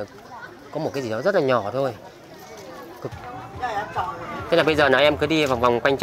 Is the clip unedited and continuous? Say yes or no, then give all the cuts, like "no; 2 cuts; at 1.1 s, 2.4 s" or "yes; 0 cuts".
no; 1 cut; at 3.1 s